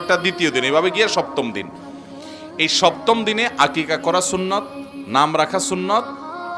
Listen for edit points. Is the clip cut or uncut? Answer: uncut